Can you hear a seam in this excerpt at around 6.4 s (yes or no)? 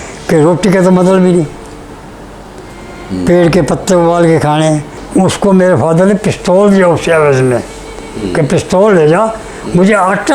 no